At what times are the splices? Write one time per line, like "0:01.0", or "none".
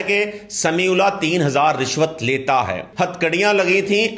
0:02.9